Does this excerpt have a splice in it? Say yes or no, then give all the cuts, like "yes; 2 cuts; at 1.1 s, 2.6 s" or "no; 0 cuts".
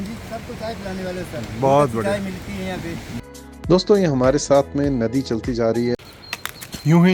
yes; 2 cuts; at 3.2 s, 5.9 s